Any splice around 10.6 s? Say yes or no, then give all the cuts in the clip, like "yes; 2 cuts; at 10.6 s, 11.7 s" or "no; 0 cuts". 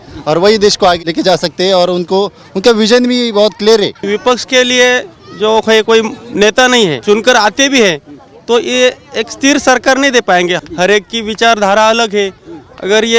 yes; 4 cuts; at 1.0 s, 4.0 s, 7.0 s, 10.6 s